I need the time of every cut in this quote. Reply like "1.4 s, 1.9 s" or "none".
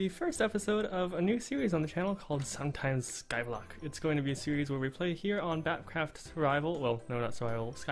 none